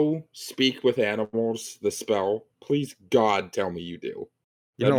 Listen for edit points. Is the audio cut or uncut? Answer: uncut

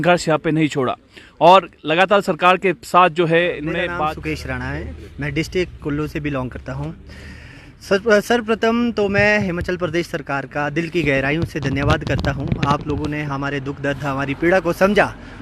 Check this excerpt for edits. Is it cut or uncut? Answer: cut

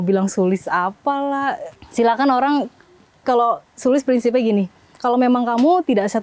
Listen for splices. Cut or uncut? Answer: uncut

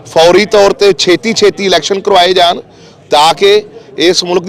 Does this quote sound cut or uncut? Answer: uncut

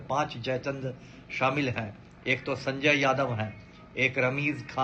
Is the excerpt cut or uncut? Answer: uncut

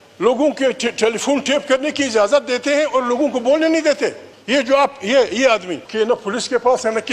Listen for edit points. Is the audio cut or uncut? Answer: cut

